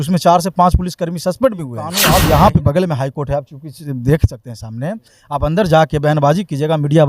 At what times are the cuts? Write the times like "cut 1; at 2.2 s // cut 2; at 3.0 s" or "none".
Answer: cut 1; at 2.1 s